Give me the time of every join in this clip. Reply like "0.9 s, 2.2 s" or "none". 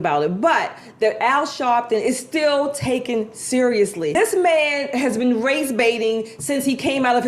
4.1 s